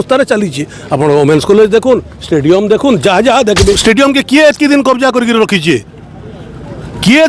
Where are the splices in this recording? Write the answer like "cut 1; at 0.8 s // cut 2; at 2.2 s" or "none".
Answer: cut 1; at 3.8 s